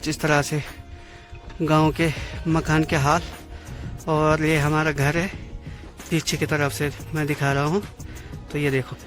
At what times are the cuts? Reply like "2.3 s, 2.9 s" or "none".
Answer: none